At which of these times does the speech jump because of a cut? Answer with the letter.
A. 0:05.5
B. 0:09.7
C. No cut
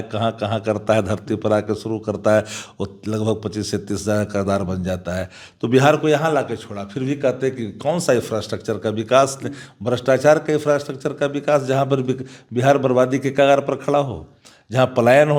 C